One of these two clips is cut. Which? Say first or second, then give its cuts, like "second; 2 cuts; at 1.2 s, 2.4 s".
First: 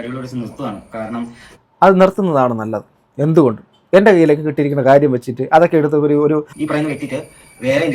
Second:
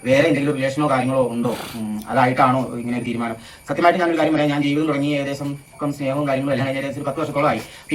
first; 1 cut; at 6.5 s